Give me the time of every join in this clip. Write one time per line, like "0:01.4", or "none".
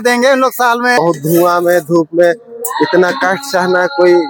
0:01.0